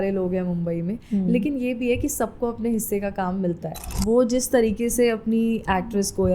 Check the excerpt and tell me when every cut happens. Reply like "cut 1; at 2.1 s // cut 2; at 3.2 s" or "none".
cut 1; at 3.9 s